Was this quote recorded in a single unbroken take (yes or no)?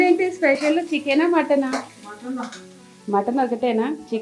yes